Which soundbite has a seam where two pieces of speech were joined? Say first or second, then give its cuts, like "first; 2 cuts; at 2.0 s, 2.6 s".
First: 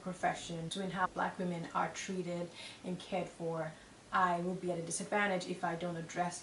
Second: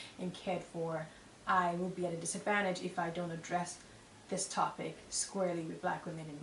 first; 1 cut; at 1.0 s